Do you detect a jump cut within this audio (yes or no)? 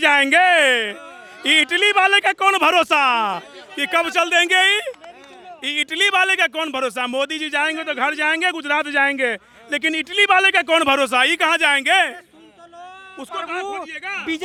no